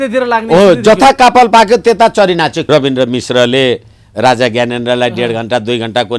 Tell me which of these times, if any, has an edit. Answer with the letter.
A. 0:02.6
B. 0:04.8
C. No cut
A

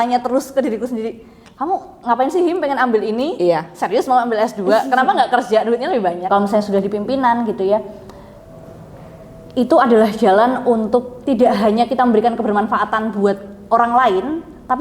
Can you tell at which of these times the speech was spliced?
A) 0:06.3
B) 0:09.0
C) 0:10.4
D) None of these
A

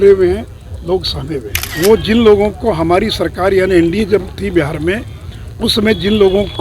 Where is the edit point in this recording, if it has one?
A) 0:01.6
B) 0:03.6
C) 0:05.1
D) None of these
A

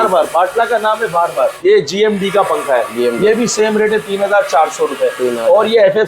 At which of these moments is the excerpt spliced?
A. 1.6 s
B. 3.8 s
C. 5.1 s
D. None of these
A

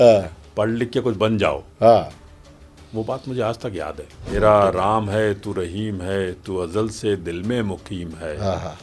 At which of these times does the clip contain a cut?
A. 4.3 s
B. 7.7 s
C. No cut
A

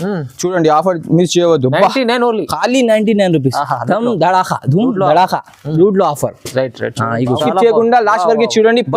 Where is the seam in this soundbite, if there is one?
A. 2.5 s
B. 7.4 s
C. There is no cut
B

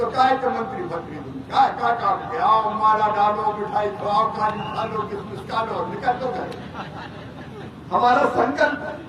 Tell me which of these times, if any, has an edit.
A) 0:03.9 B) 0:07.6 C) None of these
B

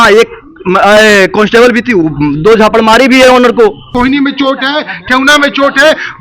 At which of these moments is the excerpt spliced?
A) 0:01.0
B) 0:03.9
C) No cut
B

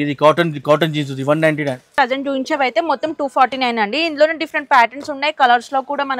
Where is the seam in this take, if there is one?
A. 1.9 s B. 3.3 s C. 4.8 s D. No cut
A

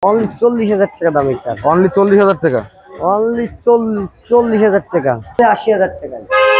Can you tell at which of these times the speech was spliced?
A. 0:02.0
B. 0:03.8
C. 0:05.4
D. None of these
C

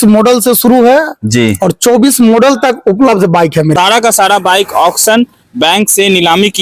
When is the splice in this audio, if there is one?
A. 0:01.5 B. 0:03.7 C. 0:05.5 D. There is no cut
B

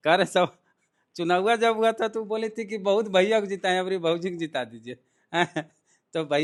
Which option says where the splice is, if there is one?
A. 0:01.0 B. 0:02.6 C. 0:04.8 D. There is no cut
D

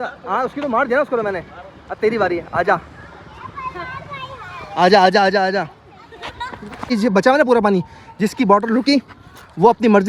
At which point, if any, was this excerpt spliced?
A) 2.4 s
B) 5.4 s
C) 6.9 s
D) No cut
C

